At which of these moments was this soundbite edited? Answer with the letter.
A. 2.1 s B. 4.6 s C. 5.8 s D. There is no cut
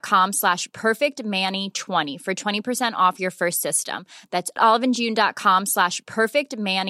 D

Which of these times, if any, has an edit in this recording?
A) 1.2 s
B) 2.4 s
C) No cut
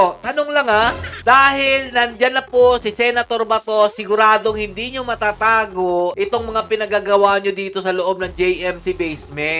A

